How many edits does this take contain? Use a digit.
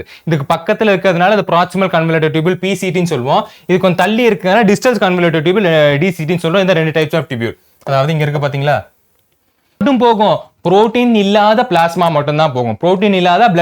1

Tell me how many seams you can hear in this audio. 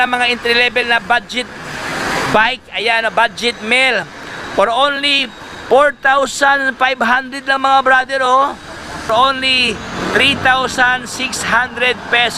1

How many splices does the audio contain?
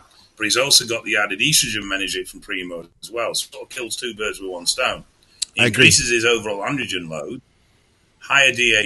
1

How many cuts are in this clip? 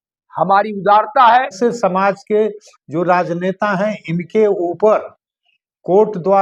1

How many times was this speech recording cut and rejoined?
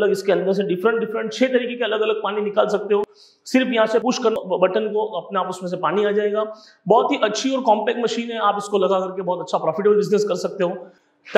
0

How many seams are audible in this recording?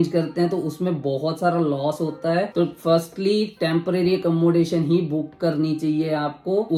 0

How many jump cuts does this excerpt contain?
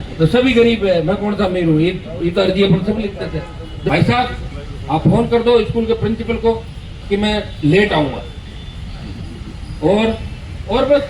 1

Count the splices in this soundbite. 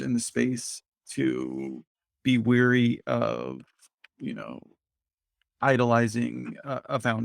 0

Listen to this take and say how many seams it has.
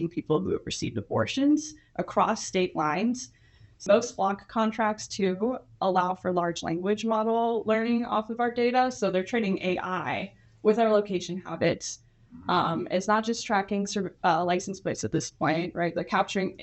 1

